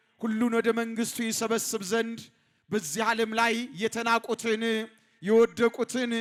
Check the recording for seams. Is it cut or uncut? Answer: uncut